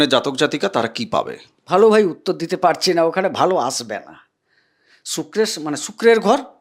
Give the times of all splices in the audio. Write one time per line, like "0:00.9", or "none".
none